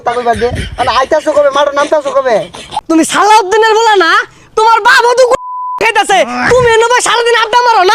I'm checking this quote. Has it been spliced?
yes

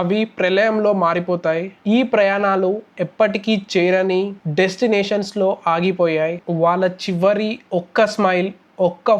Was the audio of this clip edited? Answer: yes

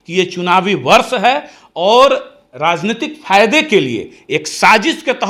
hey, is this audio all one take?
yes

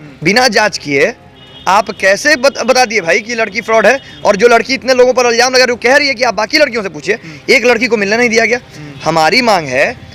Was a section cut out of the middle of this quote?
no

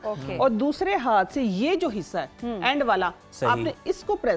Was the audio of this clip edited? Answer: no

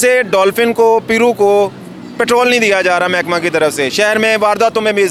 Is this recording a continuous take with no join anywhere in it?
yes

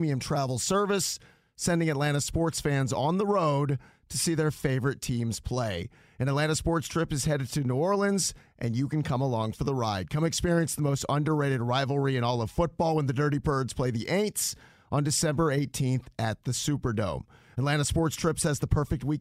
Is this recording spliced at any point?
no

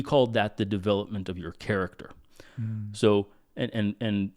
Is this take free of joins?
yes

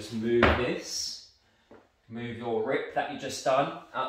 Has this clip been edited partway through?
no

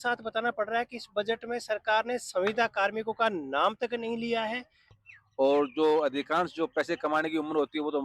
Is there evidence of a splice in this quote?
yes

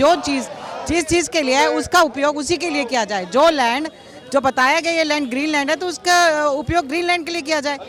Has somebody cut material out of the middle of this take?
no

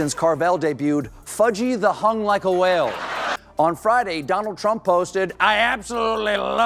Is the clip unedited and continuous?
no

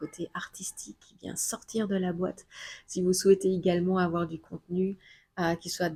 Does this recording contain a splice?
no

